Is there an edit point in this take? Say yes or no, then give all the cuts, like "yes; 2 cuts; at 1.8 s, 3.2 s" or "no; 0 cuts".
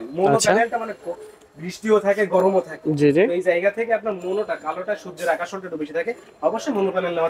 no; 0 cuts